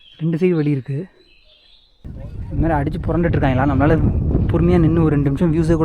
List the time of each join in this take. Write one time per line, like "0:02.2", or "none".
0:02.0